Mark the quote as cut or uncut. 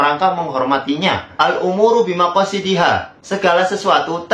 cut